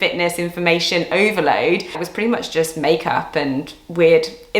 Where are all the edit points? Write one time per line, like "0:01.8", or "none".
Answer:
0:02.0